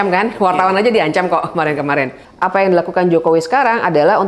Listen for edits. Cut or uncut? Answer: cut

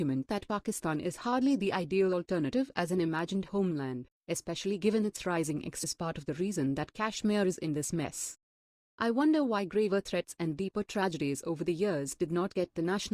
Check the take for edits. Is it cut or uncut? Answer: uncut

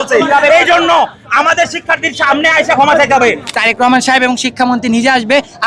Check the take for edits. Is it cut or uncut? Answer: cut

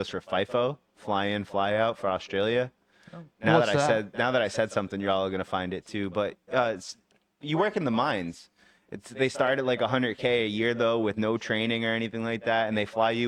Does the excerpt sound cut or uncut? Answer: uncut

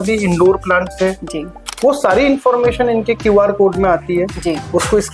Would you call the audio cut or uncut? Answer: cut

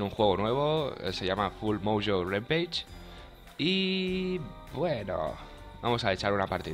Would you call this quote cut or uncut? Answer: uncut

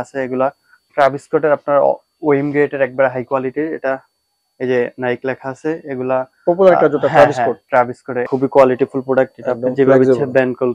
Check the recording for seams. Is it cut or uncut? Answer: cut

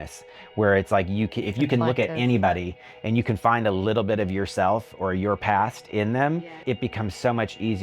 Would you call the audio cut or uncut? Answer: cut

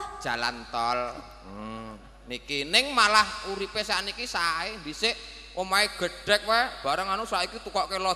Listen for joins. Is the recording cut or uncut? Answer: uncut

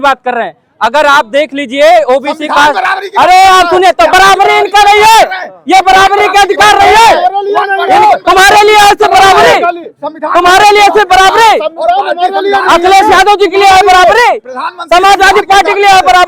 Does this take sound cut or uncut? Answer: uncut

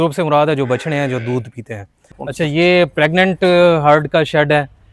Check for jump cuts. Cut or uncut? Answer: cut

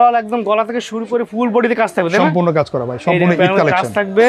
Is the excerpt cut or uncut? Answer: uncut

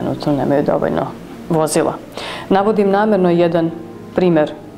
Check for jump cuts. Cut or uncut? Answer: uncut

